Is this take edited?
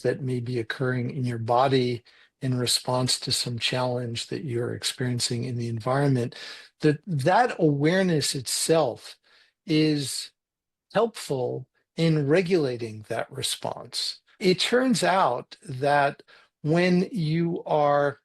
yes; 2 cuts; at 14.4 s, 16.3 s

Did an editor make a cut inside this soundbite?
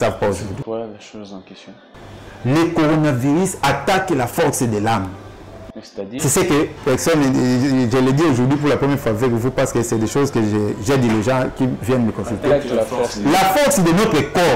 no; 0 cuts

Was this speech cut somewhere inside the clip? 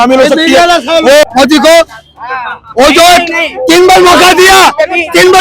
yes; 1 cut; at 1.2 s

